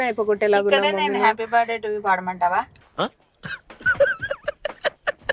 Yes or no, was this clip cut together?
no